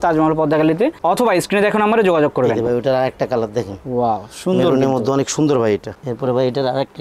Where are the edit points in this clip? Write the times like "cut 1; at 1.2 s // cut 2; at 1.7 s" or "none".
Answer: none